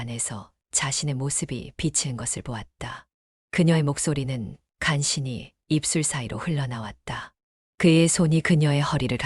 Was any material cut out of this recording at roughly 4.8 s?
no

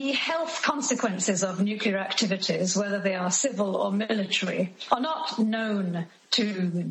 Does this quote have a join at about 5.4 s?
no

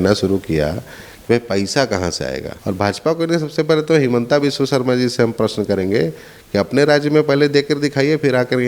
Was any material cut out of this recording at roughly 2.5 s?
yes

